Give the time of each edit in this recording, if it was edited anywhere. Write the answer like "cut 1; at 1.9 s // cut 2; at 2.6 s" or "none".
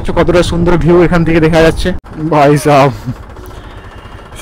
cut 1; at 2.1 s